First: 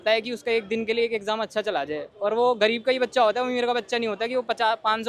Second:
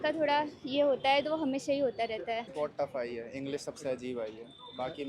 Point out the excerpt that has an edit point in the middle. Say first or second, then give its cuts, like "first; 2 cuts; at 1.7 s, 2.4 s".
second; 1 cut; at 2.5 s